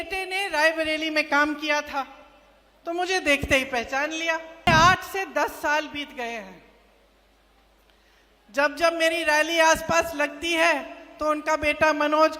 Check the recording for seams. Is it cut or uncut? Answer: cut